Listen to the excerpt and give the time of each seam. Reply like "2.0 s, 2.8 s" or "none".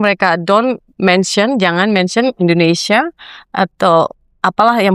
none